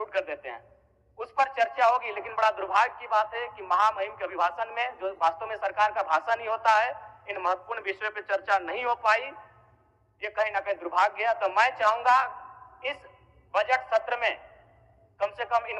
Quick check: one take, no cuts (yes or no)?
yes